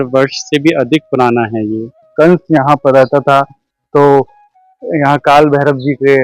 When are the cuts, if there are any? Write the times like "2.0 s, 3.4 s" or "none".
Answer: 2.1 s

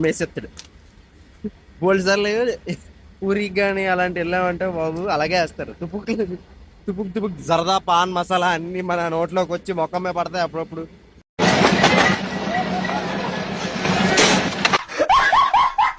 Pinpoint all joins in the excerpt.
none

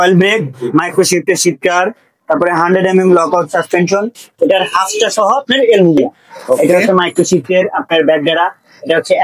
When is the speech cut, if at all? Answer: 6.6 s

